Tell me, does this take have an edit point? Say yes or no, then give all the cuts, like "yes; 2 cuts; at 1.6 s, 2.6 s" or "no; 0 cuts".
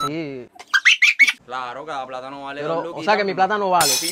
no; 0 cuts